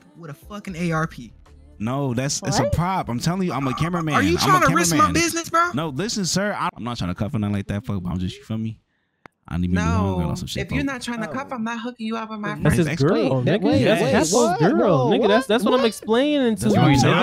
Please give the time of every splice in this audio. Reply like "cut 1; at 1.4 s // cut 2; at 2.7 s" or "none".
cut 1; at 6.7 s // cut 2; at 12.7 s

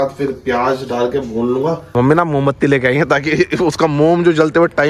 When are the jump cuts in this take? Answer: cut 1; at 1.9 s

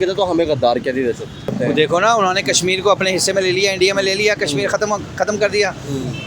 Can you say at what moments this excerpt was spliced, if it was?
cut 1; at 1.5 s

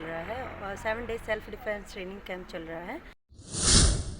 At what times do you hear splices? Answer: cut 1; at 3.2 s

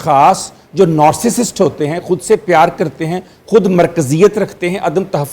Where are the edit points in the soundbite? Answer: none

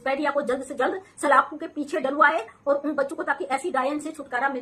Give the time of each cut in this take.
none

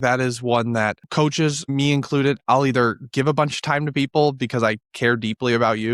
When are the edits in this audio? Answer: cut 1; at 1.0 s

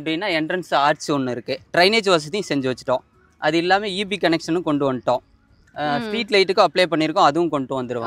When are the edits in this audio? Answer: none

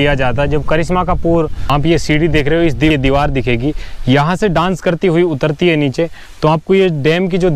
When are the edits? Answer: cut 1; at 1.6 s // cut 2; at 2.9 s

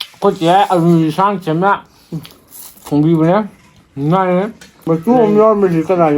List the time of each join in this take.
cut 1; at 4.7 s

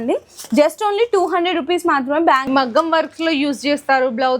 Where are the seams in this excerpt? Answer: cut 1; at 2.4 s

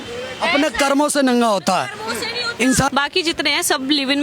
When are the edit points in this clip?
cut 1; at 2.9 s

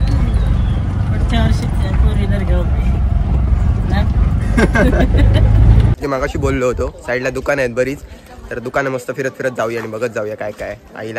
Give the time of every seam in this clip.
cut 1; at 5.9 s

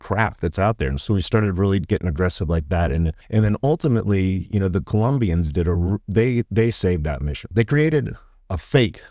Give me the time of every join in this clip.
cut 1; at 3.2 s // cut 2; at 7.5 s

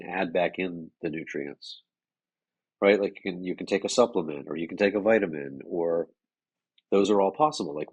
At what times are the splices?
none

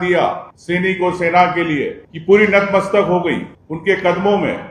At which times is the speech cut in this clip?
none

